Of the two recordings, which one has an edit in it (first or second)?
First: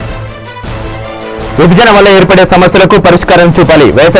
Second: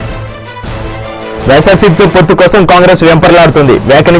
second